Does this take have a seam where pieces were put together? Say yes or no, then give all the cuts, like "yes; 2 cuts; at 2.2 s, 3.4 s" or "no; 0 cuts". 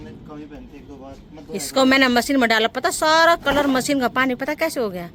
no; 0 cuts